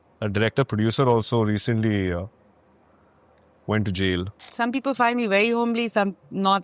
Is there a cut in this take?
yes; 1 cut; at 4.5 s

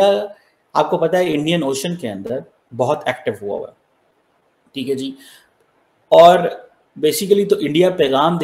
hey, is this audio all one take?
yes; 0 cuts

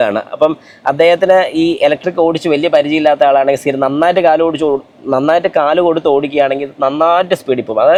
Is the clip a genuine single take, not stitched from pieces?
yes; 0 cuts

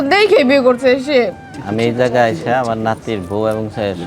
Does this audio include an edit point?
yes; 1 cut; at 1.5 s

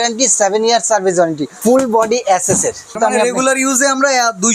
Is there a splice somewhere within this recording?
yes; 2 cuts; at 1.5 s, 3.0 s

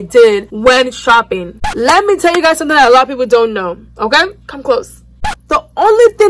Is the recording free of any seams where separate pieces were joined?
no; 2 cuts; at 1.6 s, 5.1 s

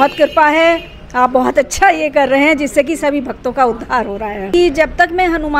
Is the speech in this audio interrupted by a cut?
yes; 1 cut; at 4.4 s

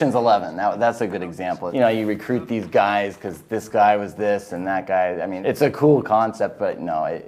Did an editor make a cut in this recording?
yes; 2 cuts; at 1.6 s, 5.3 s

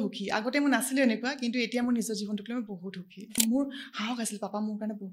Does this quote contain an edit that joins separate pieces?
yes; 1 cut; at 3.4 s

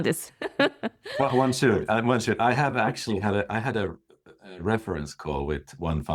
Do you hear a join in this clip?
no; 0 cuts

